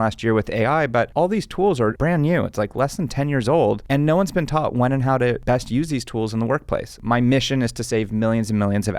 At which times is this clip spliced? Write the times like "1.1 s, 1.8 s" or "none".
2.0 s, 5.4 s, 7.0 s